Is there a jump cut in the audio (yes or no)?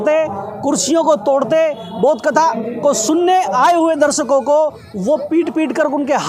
no